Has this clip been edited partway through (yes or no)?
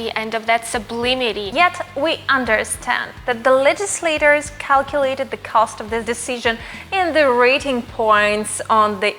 yes